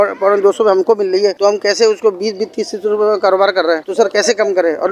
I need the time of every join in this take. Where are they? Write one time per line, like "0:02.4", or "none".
none